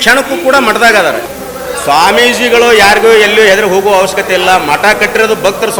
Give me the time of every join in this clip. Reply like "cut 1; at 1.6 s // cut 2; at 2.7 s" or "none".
cut 1; at 1.2 s